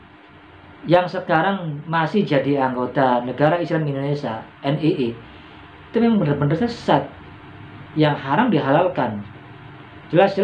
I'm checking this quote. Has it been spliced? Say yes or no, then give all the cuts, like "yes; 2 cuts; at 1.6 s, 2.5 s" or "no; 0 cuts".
no; 0 cuts